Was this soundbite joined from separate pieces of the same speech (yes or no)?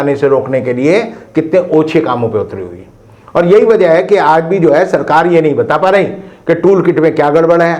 no